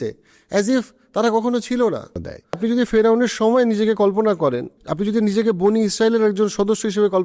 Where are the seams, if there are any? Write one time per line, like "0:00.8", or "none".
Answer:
0:02.6
0:04.8